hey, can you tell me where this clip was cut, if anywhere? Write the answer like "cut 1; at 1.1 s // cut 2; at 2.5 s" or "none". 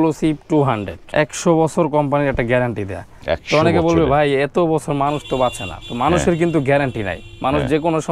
cut 1; at 0.9 s